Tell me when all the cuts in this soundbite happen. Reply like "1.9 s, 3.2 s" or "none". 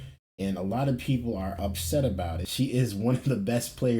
2.4 s